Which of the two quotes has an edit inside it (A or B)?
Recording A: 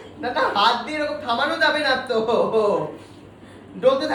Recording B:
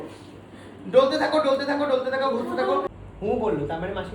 B